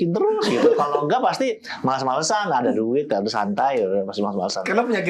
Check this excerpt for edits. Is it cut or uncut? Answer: uncut